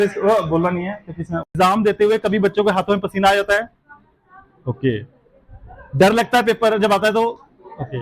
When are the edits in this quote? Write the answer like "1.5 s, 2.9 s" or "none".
1.5 s